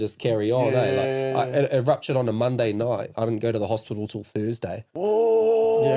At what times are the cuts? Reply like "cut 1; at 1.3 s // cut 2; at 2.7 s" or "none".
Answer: none